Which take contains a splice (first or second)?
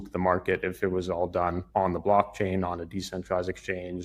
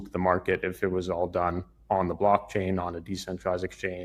first